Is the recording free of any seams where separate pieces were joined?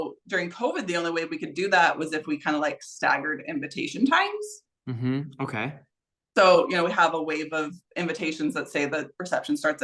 yes; 0 cuts

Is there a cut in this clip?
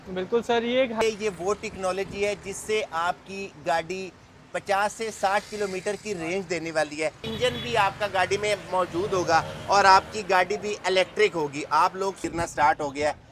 yes; 3 cuts; at 1.0 s, 7.2 s, 12.2 s

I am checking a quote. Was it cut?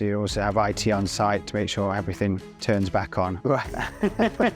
yes; 1 cut; at 3.4 s

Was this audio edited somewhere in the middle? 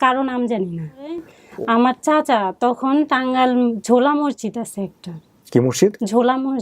yes; 1 cut; at 1.4 s

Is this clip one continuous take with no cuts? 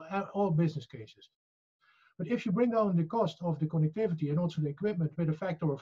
yes; 0 cuts

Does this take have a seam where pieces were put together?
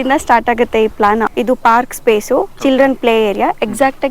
yes; 1 cut; at 1.3 s

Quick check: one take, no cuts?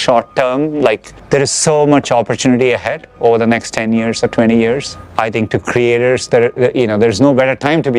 yes; 0 cuts

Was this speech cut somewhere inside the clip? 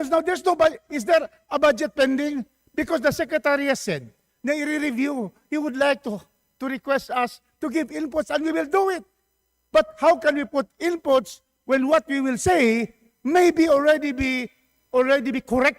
no; 0 cuts

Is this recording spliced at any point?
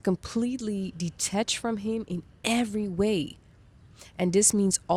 no; 0 cuts

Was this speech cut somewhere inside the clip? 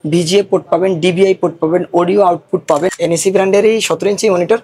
yes; 1 cut; at 2.9 s

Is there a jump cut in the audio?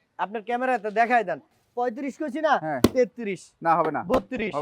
yes; 1 cut; at 1.6 s

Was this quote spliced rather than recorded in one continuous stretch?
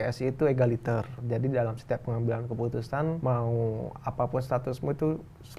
yes; 2 cuts; at 1.2 s, 3.2 s

